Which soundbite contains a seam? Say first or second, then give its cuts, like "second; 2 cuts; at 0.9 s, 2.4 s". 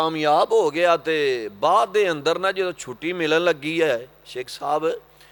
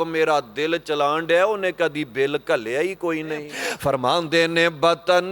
second; 1 cut; at 3.6 s